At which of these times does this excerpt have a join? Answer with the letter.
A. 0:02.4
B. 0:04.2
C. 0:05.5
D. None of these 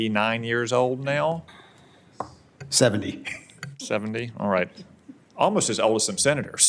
D